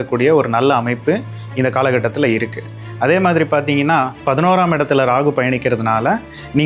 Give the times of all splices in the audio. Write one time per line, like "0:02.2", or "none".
0:04.2